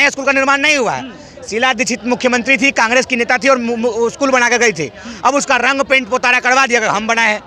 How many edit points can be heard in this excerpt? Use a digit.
0